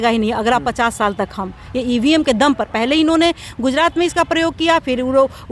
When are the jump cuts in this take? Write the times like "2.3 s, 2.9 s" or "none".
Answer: none